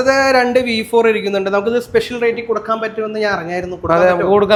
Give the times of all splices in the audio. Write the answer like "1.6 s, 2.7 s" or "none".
none